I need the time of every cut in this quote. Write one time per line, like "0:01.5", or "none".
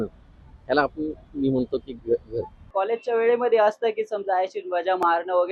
0:02.6